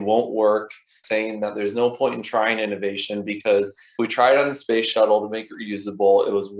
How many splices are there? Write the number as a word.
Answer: two